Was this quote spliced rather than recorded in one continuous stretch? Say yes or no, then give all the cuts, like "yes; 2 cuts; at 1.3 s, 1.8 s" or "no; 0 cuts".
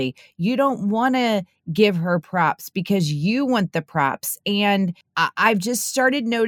yes; 1 cut; at 5.0 s